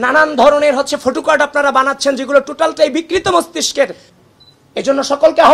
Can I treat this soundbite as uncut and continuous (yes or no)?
no